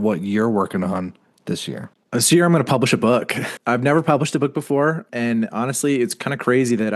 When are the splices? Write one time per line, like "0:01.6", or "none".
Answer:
0:01.9
0:03.5